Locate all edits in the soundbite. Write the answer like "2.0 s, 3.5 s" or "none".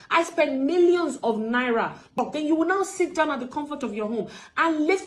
2.1 s